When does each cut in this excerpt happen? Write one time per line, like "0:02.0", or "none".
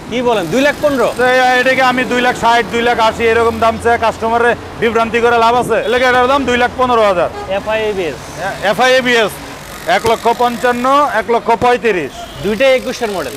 0:05.8
0:09.6